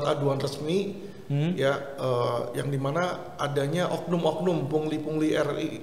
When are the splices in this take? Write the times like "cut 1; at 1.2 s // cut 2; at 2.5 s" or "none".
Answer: none